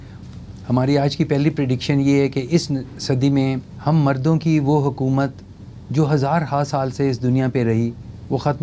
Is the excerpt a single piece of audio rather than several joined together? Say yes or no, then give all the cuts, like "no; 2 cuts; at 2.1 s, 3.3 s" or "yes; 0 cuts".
yes; 0 cuts